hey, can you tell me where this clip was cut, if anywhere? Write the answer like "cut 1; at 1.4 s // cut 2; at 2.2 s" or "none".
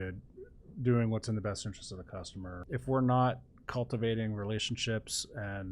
cut 1; at 2.6 s